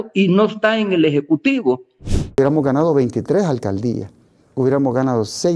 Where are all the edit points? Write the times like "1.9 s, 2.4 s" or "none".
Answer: 2.4 s